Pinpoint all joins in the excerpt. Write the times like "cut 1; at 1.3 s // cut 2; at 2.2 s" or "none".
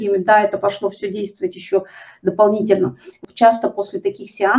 cut 1; at 3.2 s